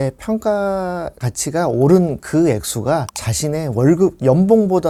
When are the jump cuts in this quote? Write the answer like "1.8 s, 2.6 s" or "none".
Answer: none